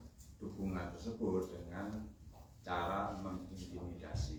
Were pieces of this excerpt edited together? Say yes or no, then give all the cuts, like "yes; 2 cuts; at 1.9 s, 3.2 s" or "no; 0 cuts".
no; 0 cuts